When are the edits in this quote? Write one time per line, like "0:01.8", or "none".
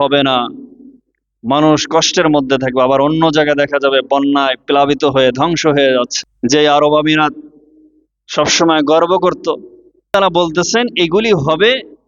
0:06.2
0:10.1